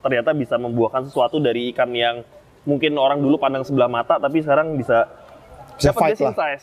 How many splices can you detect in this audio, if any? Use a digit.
0